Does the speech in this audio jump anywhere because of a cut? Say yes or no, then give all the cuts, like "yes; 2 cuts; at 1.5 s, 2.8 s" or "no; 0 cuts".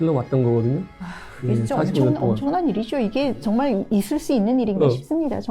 no; 0 cuts